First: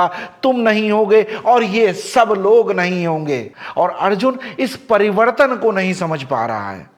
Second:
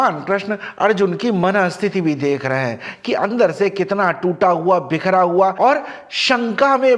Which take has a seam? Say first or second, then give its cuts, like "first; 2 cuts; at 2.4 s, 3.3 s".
first; 1 cut; at 3.4 s